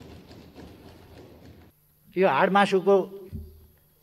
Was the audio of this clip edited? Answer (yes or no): yes